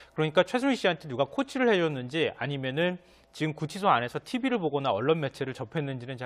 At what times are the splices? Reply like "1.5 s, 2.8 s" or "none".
none